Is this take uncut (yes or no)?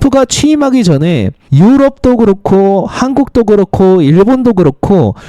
no